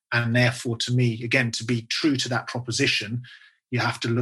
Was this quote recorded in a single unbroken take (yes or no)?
yes